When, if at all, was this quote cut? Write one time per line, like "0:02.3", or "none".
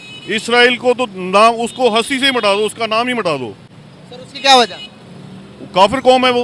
none